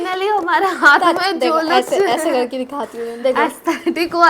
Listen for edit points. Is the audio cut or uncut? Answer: uncut